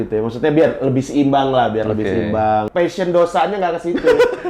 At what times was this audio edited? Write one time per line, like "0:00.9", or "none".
0:02.7

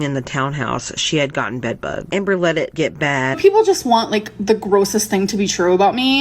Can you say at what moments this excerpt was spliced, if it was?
0:02.1
0:03.4

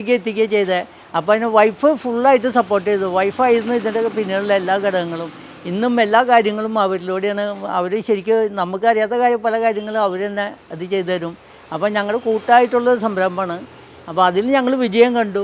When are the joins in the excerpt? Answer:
none

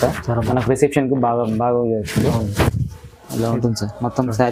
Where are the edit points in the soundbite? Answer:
none

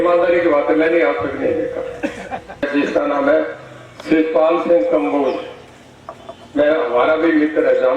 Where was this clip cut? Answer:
0:02.7

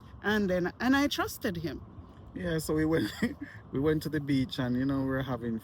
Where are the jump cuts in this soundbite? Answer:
none

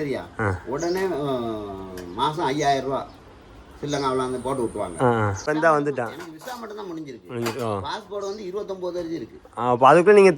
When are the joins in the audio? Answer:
0:05.4

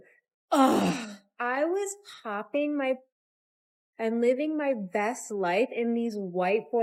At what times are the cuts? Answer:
none

